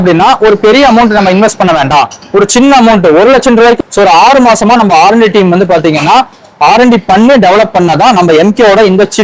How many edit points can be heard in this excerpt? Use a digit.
1